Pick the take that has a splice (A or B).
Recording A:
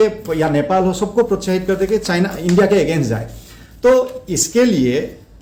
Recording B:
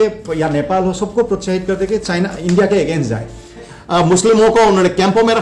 B